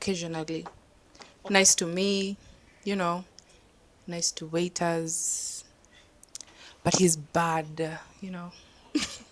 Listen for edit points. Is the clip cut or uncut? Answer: uncut